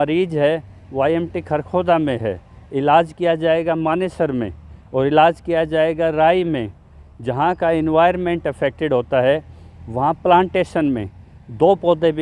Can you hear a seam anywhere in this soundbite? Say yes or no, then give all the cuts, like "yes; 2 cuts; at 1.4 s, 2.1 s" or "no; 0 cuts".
no; 0 cuts